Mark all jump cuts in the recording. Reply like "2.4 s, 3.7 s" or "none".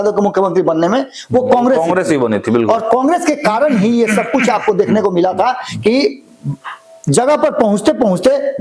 none